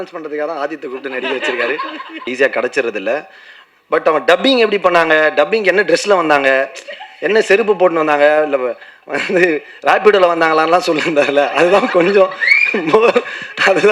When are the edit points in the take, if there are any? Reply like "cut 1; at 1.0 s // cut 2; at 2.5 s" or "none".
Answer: cut 1; at 2.3 s